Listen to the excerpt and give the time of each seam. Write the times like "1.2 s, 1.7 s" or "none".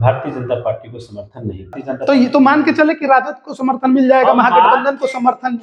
1.8 s